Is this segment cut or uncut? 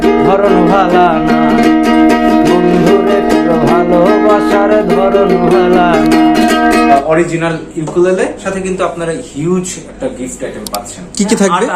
cut